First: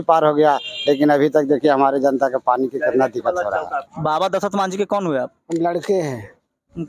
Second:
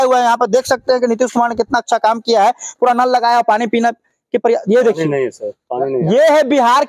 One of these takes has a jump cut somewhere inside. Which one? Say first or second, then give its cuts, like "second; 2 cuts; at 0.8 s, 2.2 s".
first; 1 cut; at 3.8 s